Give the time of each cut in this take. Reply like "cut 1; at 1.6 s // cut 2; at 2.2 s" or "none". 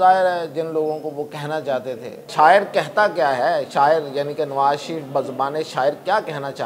cut 1; at 2.2 s